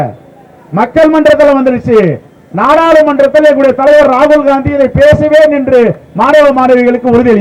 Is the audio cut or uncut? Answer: uncut